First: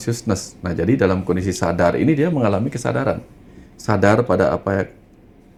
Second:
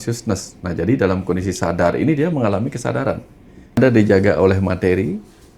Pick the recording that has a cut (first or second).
second